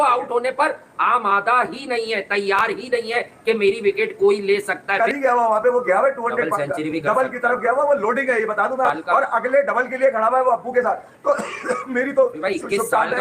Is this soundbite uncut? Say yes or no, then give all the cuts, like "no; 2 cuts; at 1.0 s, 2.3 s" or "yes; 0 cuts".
yes; 0 cuts